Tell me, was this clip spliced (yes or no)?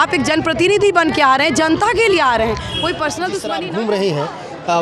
yes